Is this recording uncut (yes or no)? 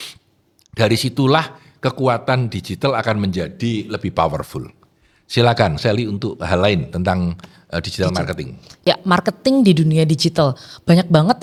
yes